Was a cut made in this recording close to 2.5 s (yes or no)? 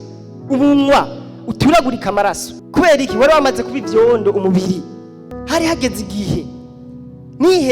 yes